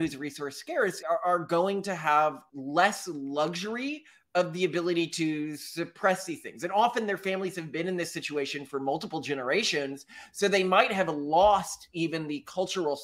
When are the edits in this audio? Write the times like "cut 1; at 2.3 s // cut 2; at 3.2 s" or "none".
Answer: cut 1; at 1.0 s // cut 2; at 2.5 s